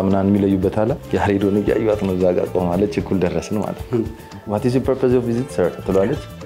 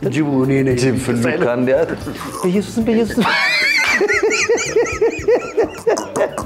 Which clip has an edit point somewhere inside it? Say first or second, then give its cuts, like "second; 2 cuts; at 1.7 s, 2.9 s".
first; 2 cuts; at 1.0 s, 4.5 s